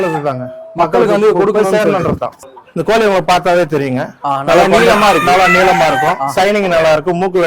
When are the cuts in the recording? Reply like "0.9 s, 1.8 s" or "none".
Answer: 2.3 s